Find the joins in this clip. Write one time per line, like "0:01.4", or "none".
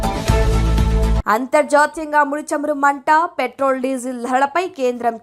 0:01.2